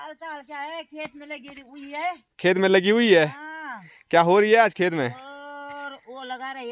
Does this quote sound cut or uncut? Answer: uncut